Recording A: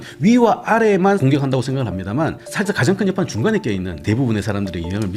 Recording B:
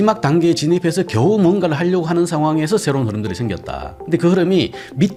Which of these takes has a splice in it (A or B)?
A